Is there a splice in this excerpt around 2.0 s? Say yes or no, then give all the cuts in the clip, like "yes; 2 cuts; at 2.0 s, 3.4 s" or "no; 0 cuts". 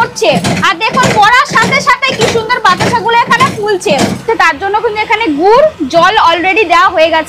no; 1 cut; at 4.2 s